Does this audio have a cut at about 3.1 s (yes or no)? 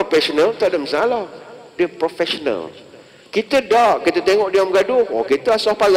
no